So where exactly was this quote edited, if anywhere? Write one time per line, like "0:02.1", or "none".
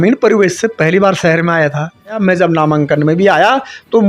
0:02.2